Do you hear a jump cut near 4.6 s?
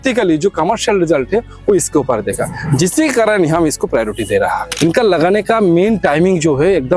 yes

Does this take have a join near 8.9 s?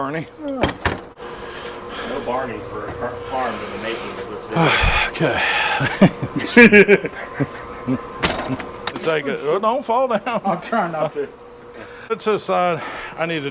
yes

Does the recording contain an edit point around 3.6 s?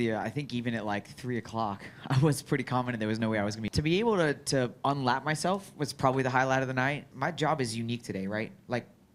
yes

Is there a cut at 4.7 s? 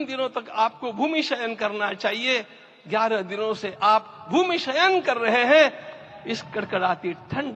no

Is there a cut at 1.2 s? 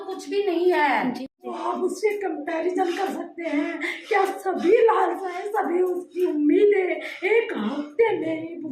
yes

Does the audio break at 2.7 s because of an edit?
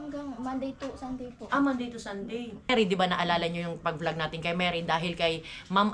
yes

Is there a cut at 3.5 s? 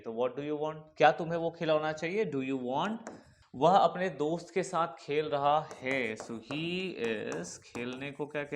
yes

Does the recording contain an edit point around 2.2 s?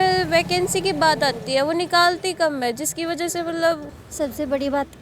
no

